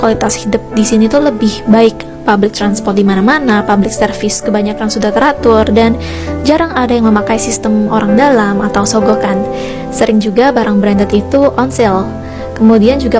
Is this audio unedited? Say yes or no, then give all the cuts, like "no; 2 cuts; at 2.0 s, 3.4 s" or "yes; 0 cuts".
yes; 0 cuts